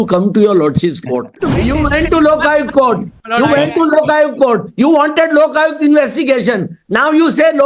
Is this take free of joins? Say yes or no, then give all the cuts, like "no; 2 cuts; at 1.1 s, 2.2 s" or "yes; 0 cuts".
no; 1 cut; at 1.4 s